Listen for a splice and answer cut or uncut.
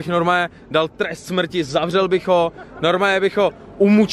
uncut